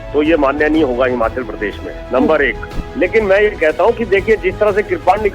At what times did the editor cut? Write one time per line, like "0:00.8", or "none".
0:02.8